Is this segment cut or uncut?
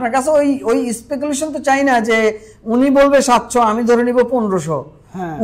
uncut